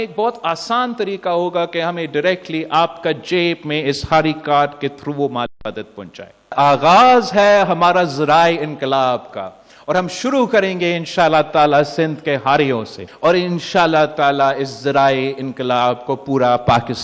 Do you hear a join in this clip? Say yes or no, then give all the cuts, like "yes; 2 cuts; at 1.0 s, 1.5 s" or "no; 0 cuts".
yes; 2 cuts; at 6.5 s, 13.0 s